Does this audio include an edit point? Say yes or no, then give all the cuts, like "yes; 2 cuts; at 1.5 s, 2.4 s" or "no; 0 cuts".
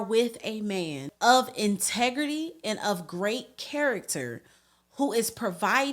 yes; 1 cut; at 1.1 s